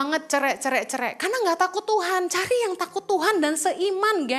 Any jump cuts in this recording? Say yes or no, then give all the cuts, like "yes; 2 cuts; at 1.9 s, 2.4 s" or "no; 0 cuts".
no; 0 cuts